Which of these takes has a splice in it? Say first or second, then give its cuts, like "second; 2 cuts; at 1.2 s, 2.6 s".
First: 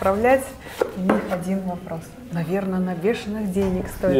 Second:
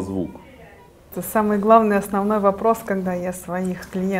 second; 1 cut; at 1.2 s